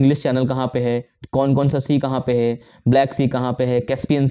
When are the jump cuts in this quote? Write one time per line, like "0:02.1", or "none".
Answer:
none